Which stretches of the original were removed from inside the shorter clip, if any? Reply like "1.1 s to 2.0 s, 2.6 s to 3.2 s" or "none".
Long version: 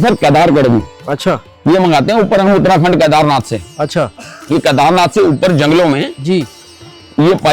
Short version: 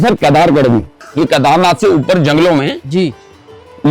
1.0 s to 4.3 s